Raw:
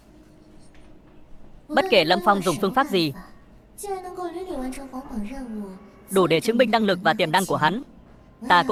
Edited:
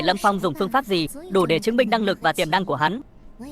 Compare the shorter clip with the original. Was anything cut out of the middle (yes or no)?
yes